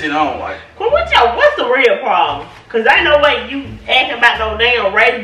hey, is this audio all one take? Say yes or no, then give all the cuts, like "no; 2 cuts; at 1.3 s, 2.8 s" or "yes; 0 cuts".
yes; 0 cuts